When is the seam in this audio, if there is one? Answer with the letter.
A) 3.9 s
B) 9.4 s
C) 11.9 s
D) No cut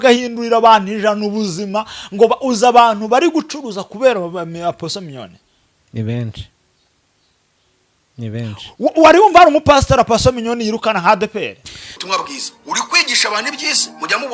C